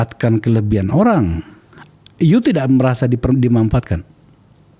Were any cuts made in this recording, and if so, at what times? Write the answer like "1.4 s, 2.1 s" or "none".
none